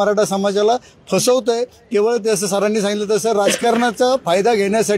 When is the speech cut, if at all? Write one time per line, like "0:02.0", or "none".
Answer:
none